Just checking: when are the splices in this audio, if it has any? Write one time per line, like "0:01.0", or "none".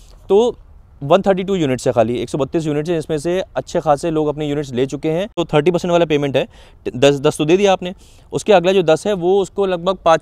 0:05.4